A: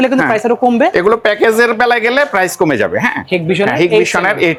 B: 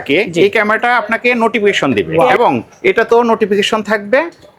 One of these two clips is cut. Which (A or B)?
B